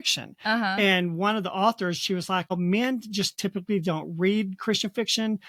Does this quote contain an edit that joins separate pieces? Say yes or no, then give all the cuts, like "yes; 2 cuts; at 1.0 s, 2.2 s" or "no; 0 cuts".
no; 0 cuts